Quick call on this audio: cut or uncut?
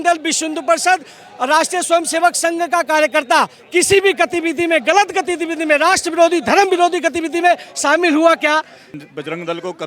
cut